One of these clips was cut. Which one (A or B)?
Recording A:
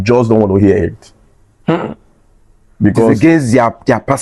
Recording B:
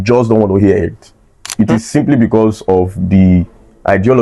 B